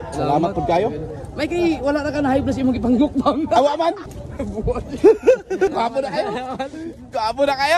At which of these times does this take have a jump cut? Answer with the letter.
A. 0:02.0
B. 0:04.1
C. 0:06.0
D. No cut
B